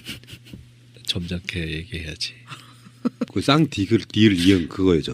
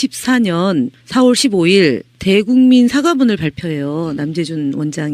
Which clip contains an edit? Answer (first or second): second